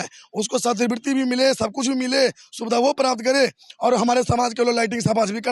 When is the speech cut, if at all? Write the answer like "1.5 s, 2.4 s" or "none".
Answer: none